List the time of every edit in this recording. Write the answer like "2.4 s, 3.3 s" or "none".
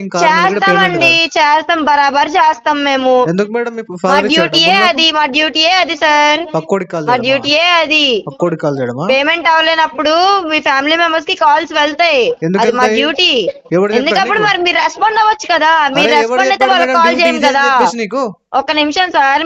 none